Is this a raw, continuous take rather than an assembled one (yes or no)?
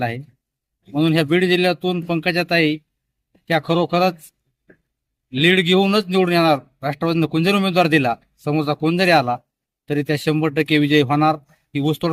yes